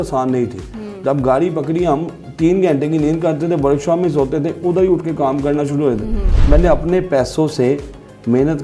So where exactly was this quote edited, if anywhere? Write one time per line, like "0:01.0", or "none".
0:06.2